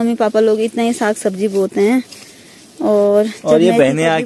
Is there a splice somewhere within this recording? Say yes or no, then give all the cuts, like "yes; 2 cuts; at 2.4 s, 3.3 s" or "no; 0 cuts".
no; 0 cuts